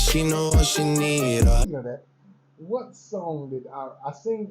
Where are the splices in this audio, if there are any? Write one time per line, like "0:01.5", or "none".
0:01.6